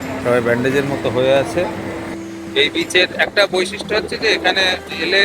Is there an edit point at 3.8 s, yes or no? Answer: no